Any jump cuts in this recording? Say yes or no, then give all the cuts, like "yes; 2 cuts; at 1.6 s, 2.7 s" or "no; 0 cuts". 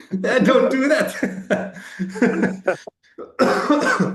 no; 0 cuts